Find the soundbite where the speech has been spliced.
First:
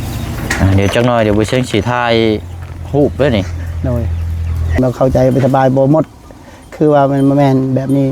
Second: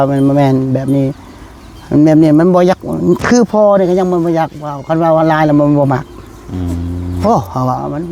first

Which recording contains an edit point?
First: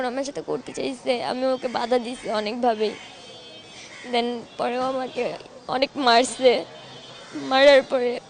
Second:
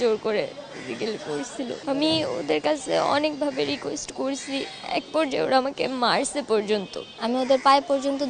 second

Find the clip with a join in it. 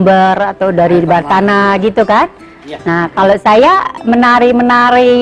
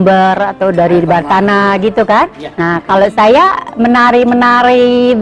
second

